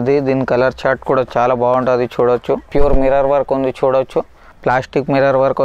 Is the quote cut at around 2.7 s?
yes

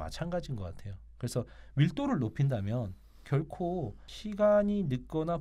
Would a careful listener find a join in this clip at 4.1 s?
yes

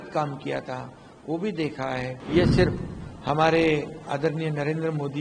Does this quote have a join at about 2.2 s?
yes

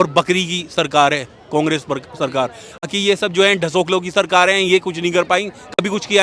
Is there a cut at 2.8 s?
yes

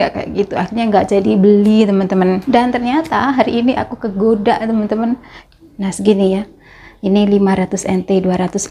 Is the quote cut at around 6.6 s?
no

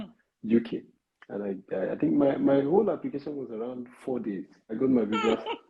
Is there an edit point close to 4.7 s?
yes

